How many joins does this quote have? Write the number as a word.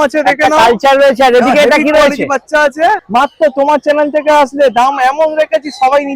one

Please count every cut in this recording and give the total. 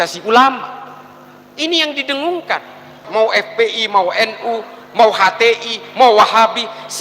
one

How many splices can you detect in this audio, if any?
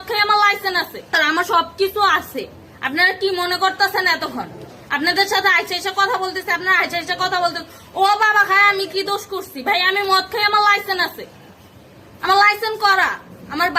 one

